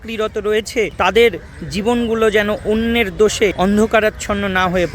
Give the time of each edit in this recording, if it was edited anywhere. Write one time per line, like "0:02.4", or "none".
0:00.9
0:03.5